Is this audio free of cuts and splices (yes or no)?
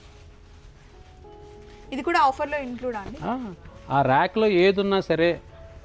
yes